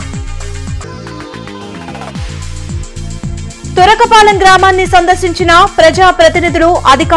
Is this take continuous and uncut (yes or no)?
no